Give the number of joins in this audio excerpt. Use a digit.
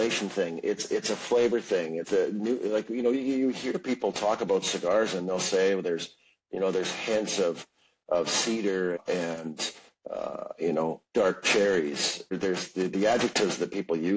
3